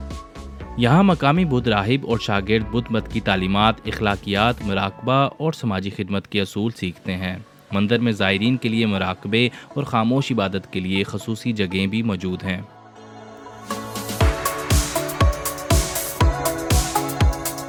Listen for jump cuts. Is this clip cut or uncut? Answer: uncut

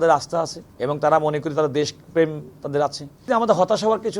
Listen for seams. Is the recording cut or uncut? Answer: cut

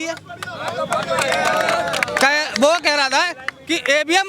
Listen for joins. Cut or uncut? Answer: uncut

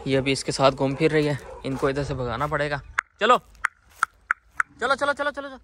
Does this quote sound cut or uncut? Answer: uncut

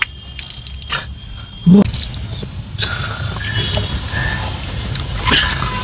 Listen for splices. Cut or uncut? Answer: cut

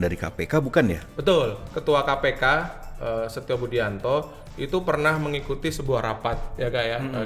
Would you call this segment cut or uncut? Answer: cut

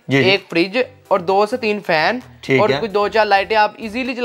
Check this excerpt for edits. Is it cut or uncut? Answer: uncut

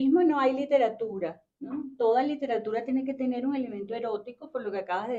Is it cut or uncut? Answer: uncut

